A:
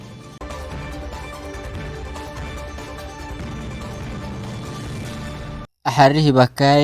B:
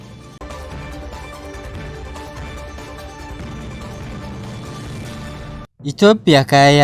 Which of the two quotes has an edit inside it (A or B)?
B